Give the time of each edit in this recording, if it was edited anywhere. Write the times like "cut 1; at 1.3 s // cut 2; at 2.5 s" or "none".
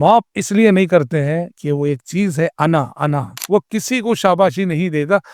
cut 1; at 1.5 s // cut 2; at 3.3 s